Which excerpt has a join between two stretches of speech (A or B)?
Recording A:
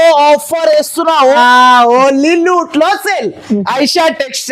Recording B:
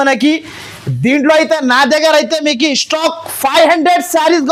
A